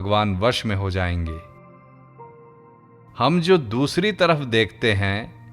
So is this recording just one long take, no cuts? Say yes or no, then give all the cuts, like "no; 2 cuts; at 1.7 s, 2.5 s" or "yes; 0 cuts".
no; 2 cuts; at 1.4 s, 2.9 s